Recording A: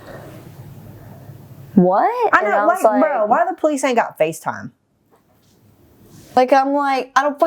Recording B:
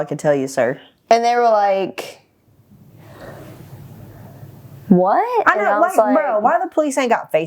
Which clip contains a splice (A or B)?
A